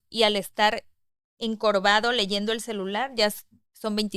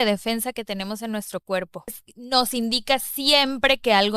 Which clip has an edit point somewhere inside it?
second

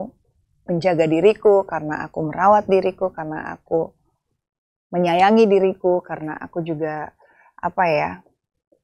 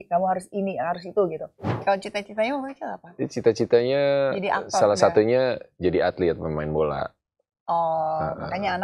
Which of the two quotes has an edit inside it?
second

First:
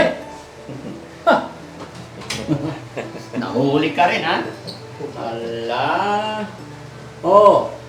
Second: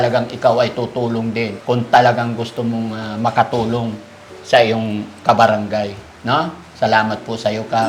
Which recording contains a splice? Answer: second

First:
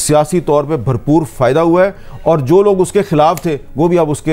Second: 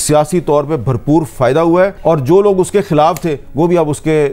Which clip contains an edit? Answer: second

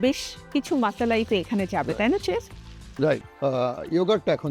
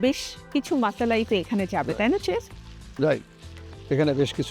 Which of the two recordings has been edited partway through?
first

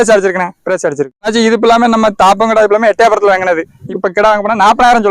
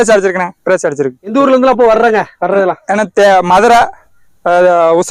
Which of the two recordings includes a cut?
first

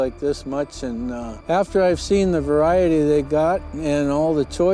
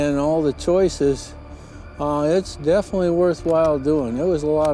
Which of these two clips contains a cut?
first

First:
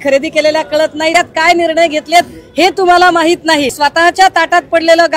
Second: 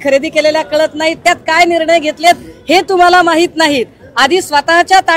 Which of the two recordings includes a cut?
first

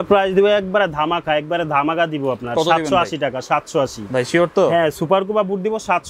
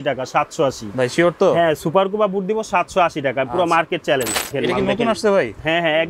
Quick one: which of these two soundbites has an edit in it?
second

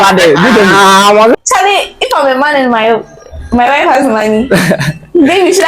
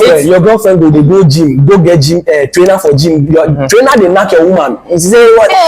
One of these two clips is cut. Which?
first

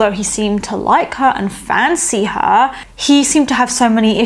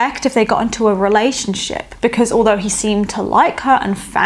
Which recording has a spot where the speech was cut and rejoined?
first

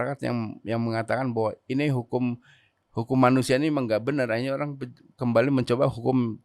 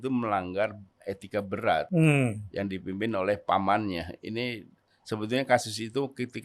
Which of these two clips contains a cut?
second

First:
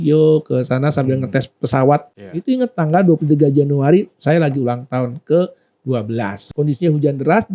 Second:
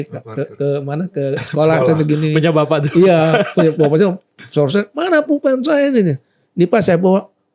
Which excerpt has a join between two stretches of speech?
first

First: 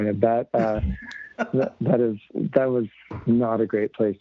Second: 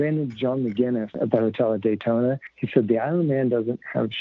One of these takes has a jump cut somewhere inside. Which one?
second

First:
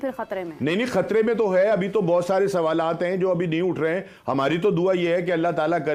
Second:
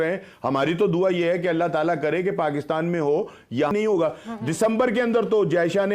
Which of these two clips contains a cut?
second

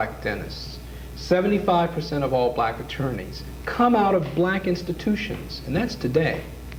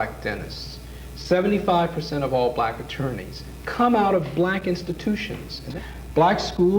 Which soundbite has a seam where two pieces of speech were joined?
second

